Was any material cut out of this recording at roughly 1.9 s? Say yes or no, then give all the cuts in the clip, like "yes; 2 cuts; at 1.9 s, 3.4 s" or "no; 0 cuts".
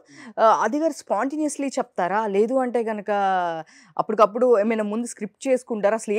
no; 0 cuts